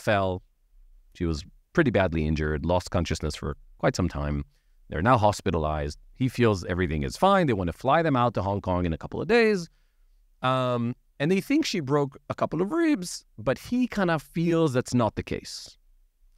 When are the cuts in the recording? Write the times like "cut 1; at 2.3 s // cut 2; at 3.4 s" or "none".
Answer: none